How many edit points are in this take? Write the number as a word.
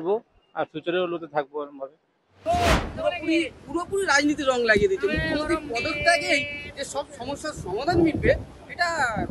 one